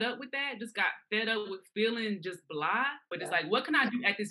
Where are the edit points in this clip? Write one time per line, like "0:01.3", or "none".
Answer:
0:03.0